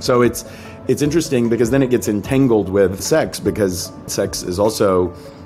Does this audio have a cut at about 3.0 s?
yes; 2 cuts; at 3.0 s, 4.1 s

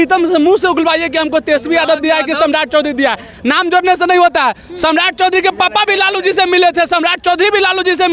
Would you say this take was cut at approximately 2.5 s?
no; 0 cuts

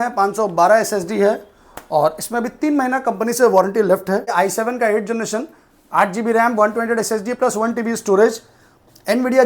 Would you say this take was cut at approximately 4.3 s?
yes; 1 cut; at 4.3 s

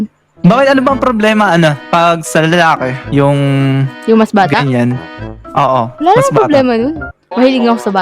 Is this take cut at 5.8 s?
no; 0 cuts

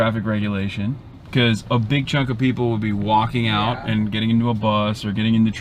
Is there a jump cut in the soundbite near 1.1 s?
yes; 1 cut; at 1.1 s

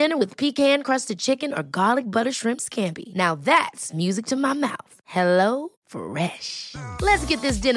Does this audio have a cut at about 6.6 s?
no; 0 cuts

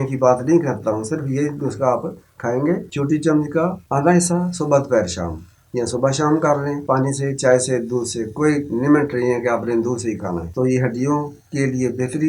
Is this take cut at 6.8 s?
yes; 4 cuts; at 2.9 s, 3.8 s, 6.8 s, 10.5 s

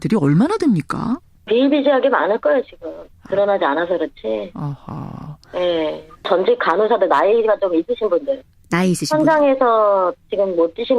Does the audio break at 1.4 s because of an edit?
yes; 1 cut; at 1.4 s

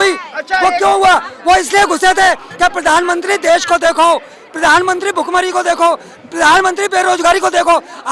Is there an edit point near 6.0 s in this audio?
no; 1 cut; at 1.3 s

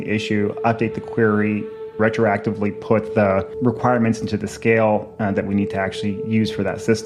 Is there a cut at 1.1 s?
no; 0 cuts

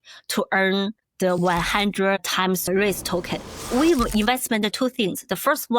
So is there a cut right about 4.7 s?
yes; 4 cuts; at 1.4 s, 2.6 s, 3.6 s, 4.7 s

